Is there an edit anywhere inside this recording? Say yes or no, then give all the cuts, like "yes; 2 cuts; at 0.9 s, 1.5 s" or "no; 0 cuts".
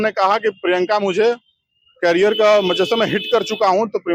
no; 0 cuts